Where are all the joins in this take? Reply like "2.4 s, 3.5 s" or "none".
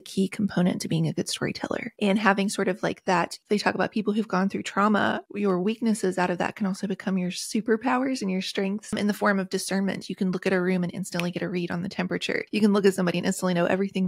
1.9 s, 3.4 s, 5.3 s, 9.0 s, 12.5 s